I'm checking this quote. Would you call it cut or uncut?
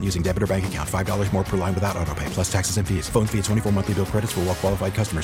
uncut